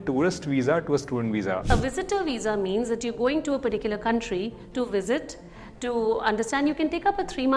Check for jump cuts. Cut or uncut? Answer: cut